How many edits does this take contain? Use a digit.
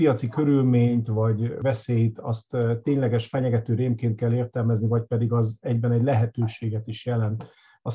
1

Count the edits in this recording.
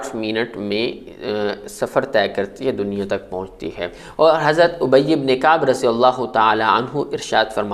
1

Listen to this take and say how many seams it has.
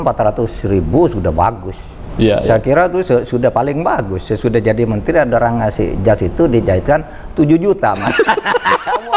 0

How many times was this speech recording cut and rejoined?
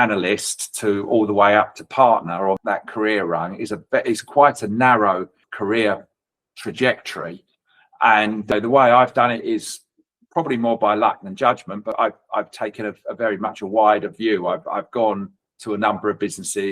4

